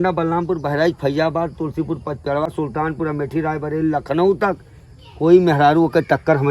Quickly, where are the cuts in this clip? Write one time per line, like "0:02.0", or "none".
0:02.5